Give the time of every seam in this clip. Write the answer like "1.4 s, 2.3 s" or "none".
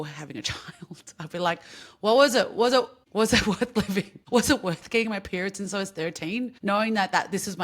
3.0 s, 4.2 s, 6.5 s